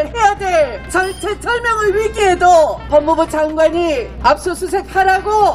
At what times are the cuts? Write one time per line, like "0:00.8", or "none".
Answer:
0:00.9
0:02.8
0:04.1